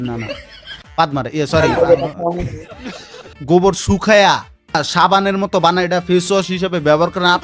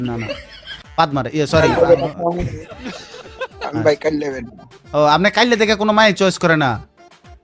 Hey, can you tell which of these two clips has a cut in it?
first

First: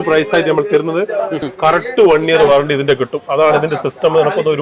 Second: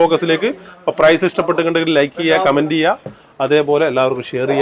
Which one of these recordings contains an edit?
first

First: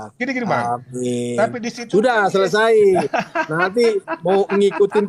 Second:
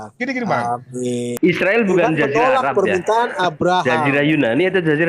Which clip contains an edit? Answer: second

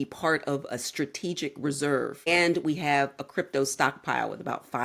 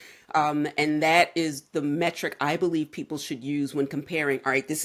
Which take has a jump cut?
first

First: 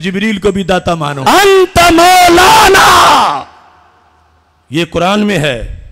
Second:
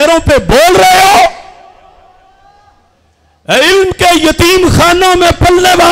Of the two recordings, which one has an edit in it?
first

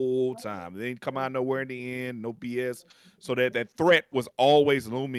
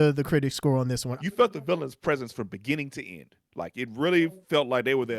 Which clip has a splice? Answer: second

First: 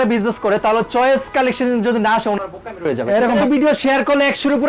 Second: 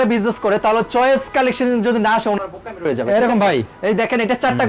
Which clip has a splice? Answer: first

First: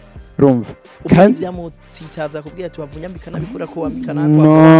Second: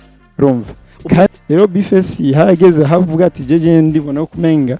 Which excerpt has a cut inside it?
second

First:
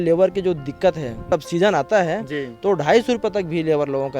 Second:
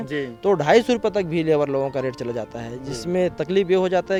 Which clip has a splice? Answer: first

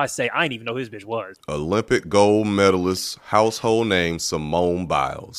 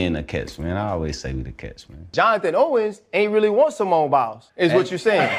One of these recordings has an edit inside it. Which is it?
second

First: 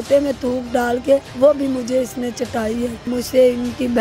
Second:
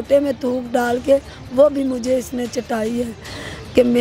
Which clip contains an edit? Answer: first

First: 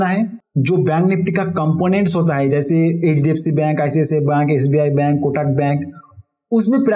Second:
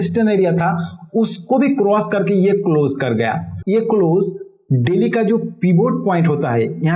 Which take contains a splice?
second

